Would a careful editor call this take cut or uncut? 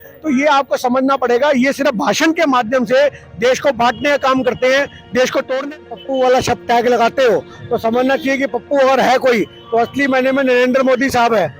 cut